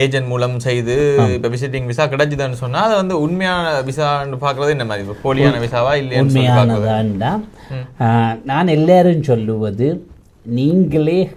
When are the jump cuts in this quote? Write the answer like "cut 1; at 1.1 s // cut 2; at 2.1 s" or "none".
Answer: none